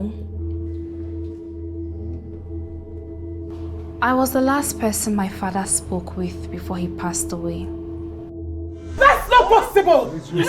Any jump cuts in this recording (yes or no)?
yes